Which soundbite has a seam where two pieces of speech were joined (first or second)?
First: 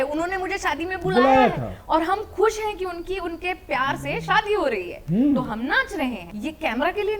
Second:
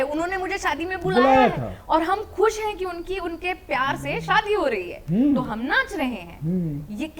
first